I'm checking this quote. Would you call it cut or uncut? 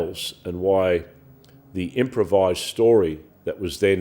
uncut